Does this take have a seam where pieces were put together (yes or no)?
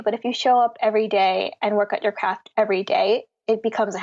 no